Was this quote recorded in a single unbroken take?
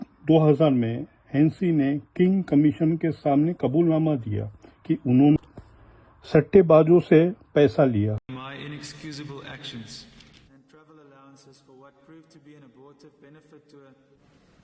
yes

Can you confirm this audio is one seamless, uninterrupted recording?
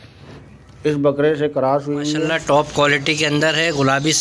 no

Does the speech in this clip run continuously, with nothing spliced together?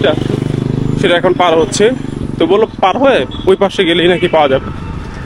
yes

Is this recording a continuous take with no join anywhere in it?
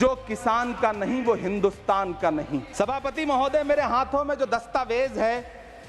no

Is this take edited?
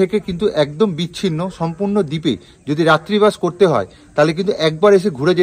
no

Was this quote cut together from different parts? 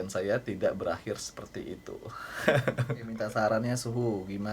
yes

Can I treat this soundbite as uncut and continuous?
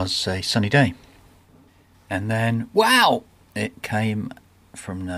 yes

